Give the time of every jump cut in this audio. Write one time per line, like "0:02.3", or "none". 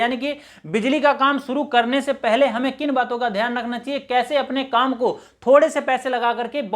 none

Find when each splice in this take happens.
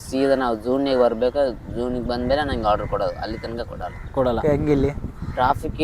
0:04.4

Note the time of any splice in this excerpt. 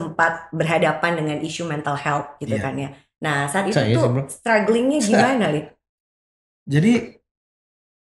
none

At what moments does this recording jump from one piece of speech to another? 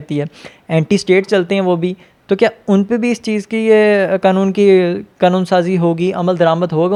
none

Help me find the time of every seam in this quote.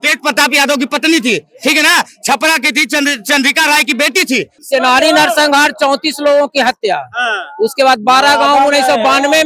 0:04.6

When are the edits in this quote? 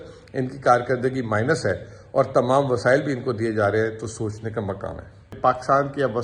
0:05.3

